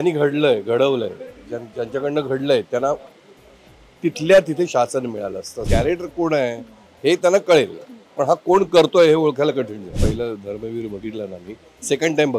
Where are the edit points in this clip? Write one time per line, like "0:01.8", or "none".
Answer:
0:05.5
0:10.0